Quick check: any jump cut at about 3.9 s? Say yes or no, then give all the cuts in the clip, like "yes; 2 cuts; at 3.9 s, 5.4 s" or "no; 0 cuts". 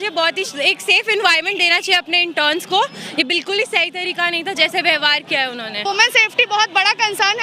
no; 1 cut; at 5.8 s